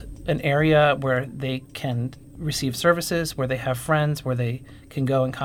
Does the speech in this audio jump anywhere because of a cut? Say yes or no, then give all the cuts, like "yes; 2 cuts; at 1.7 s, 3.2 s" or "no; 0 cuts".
yes; 1 cut; at 2.0 s